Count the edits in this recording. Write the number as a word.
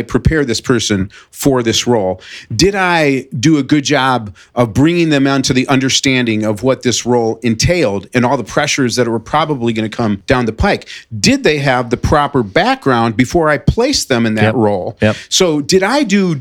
zero